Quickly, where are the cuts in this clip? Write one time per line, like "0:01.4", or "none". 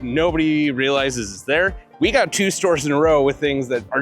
none